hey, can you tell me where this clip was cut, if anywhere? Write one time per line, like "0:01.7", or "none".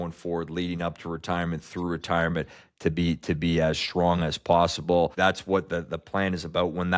0:05.1